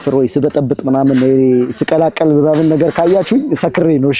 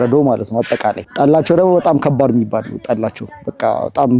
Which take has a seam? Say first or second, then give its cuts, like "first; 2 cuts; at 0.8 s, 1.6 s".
second; 1 cut; at 1.0 s